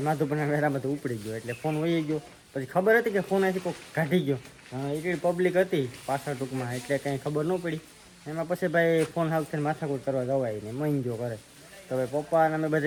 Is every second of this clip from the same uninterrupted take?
yes; 0 cuts

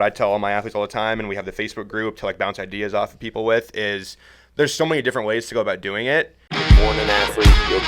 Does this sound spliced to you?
yes; 1 cut; at 6.5 s

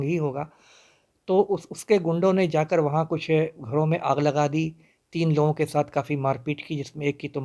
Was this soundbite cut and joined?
no; 0 cuts

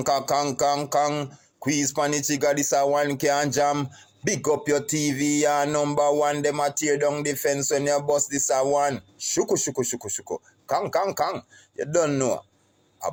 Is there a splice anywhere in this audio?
no; 0 cuts

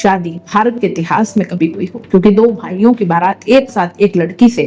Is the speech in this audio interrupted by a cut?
no; 0 cuts

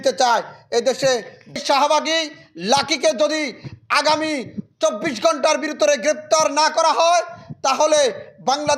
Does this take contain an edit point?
yes; 1 cut; at 1.6 s

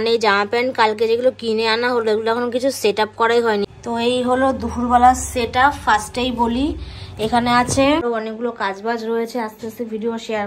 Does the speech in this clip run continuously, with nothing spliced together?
no; 2 cuts; at 3.7 s, 8.0 s

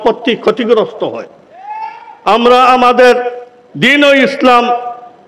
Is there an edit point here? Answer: no; 0 cuts

